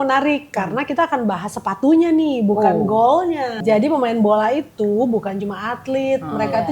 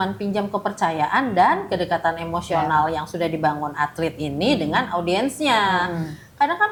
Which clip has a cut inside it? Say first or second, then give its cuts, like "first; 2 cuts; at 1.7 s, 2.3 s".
first; 1 cut; at 3.6 s